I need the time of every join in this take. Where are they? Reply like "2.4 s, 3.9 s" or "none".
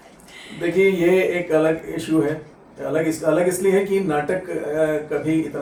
none